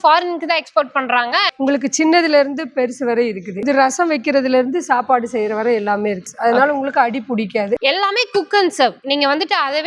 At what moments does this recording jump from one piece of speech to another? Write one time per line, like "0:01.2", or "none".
0:01.5
0:03.6
0:06.3
0:07.8